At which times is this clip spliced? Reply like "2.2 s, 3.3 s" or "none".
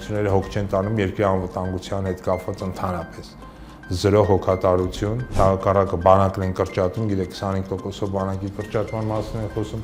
none